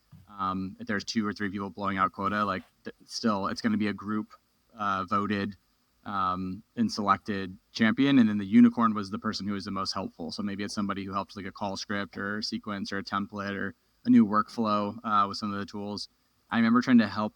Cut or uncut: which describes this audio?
cut